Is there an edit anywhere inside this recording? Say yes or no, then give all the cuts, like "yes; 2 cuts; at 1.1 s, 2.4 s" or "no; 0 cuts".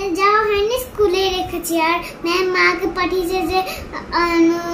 no; 0 cuts